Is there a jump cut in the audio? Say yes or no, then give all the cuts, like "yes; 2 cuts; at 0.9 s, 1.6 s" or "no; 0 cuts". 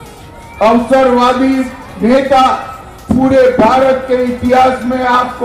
no; 0 cuts